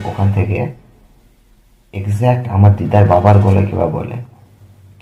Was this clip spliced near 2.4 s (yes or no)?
no